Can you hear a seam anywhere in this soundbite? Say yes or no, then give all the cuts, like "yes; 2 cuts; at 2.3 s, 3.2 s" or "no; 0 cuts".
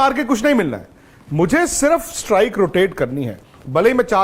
no; 0 cuts